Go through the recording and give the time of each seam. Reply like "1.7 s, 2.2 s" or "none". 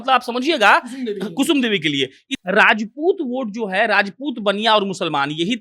2.3 s